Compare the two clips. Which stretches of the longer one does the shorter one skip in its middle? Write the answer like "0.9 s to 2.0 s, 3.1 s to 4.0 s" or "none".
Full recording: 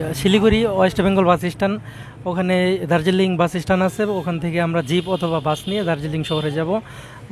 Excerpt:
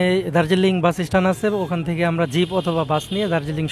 none